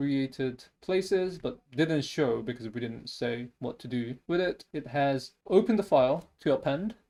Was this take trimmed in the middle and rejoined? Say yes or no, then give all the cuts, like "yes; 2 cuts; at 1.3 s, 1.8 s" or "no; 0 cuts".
no; 0 cuts